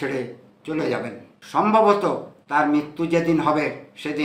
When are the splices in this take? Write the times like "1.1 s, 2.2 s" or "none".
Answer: 1.3 s